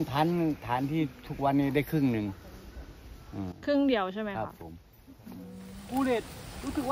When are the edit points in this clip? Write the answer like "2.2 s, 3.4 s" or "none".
5.8 s